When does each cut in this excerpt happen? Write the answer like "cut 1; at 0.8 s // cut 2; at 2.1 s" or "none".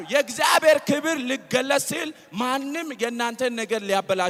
none